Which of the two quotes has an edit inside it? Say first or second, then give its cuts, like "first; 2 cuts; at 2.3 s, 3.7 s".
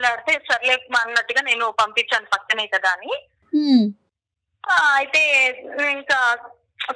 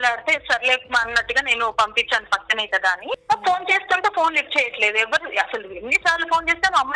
second; 1 cut; at 3.2 s